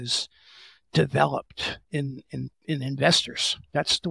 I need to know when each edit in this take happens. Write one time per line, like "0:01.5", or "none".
none